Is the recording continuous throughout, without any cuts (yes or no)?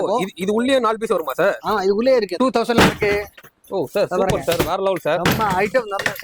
no